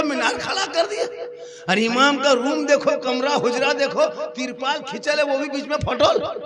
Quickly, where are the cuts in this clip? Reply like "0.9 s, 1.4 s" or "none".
none